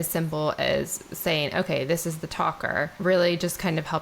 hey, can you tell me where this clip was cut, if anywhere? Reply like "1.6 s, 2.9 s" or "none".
2.9 s